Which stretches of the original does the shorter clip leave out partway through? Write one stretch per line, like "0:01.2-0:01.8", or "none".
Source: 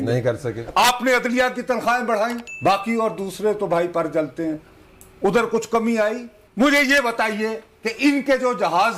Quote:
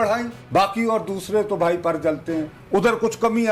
0:04.7-0:05.1